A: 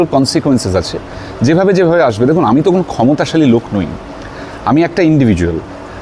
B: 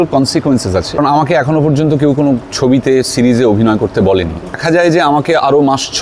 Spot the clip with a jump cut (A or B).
B